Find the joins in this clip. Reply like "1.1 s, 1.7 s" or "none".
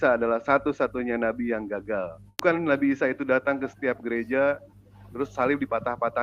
2.2 s